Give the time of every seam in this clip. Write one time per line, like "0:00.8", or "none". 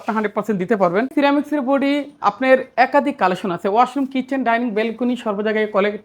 0:01.1